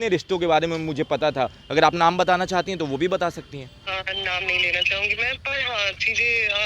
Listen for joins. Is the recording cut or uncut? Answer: cut